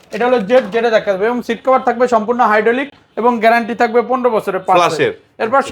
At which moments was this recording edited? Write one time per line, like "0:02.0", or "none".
none

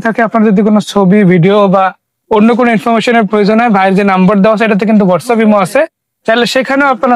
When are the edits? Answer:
none

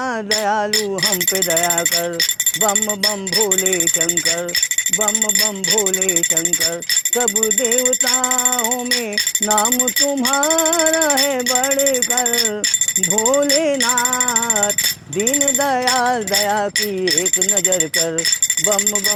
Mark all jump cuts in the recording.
none

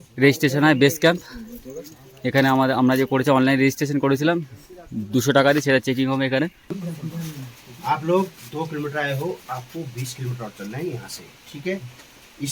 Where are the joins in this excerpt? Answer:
0:06.8

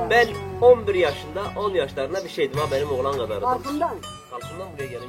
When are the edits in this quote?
none

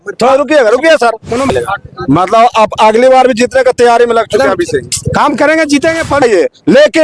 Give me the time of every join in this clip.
0:01.5
0:06.2

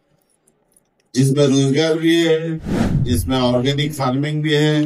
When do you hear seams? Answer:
none

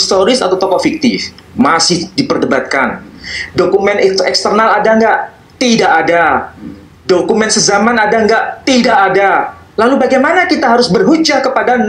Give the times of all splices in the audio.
none

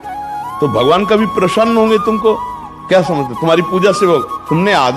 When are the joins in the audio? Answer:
none

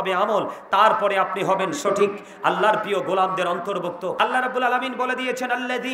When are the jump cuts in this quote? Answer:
0:03.9

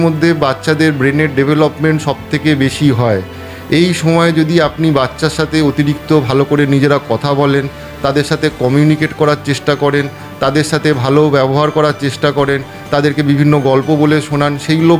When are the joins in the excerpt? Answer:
none

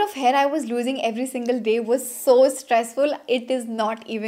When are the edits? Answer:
none

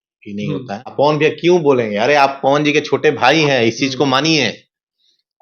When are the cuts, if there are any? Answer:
0:00.9

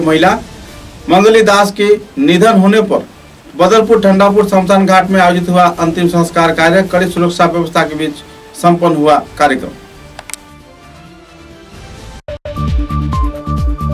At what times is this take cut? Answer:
0:12.4

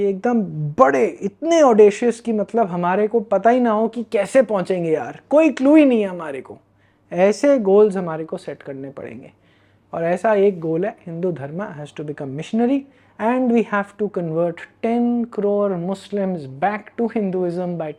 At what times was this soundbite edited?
none

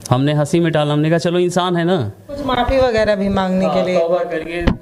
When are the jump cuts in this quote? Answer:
0:02.4

